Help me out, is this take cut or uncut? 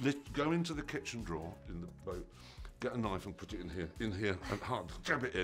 uncut